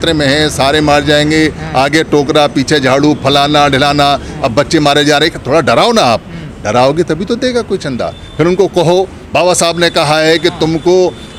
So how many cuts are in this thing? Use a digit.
0